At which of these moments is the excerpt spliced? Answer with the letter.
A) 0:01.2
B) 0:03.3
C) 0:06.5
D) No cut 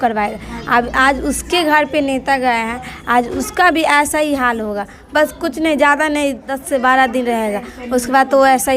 C